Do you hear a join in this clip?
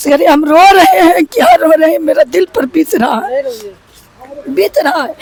no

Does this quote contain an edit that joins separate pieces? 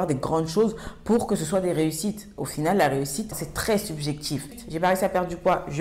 yes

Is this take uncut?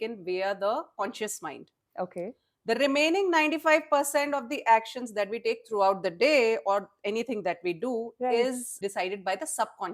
no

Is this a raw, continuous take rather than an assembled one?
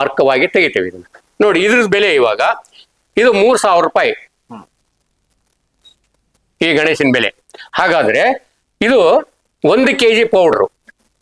no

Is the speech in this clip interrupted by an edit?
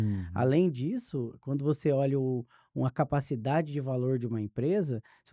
no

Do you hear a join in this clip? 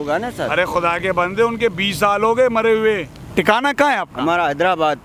yes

